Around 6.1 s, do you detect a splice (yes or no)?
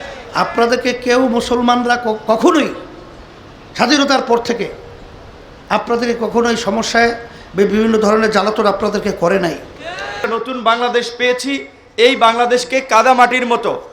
no